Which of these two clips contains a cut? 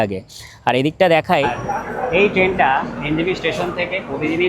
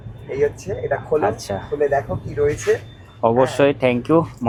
first; 1 cut; at 1.6 s

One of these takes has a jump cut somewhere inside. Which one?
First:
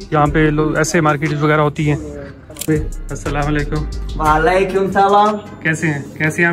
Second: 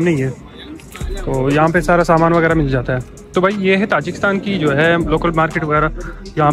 first; 1 cut; at 2.6 s

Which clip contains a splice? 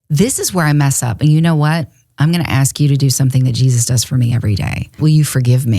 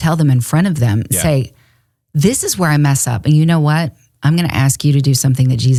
first; 1 cut; at 4.9 s

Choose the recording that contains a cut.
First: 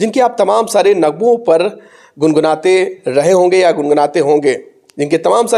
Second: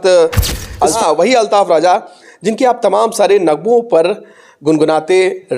second; 1 cut; at 1.0 s

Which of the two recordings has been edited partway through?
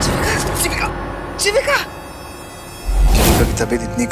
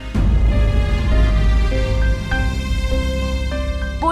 first; 1 cut; at 3.1 s

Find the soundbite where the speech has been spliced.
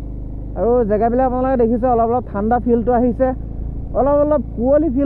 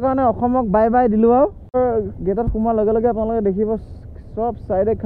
second; 1 cut; at 1.7 s

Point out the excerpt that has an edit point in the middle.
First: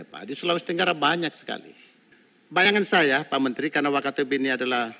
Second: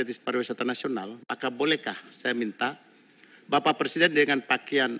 first; 1 cut; at 2.6 s

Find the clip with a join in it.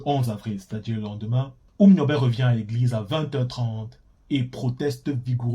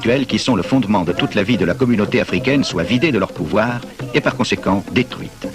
first; 1 cut; at 1.6 s

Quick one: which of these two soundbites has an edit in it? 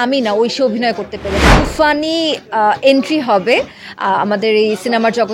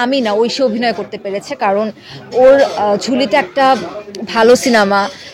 first; 1 cut; at 1.5 s

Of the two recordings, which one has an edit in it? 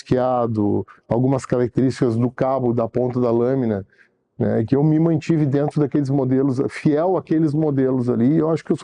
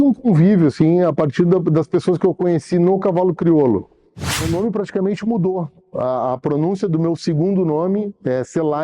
second; 1 cut; at 4.4 s

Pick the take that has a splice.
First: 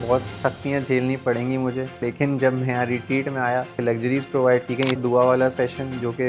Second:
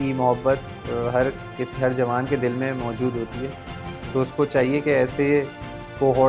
first; 3 cuts; at 2.0 s, 3.7 s, 5.0 s

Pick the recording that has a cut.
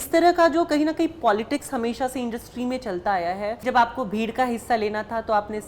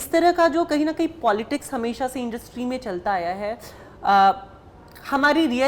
first; 1 cut; at 3.6 s

